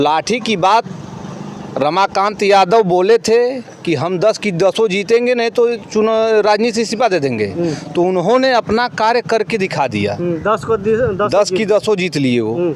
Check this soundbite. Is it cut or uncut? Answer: uncut